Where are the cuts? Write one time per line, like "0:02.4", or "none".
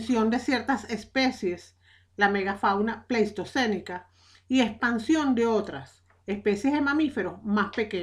0:03.2